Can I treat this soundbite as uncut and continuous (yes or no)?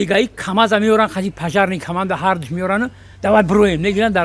yes